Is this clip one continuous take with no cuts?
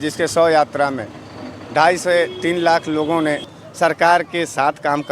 no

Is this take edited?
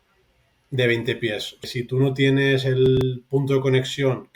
yes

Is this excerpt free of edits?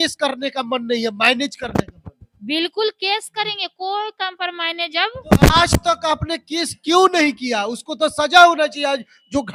yes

